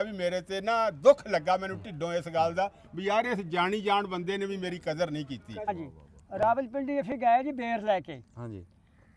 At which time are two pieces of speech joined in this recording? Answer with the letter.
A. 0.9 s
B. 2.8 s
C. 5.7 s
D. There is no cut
C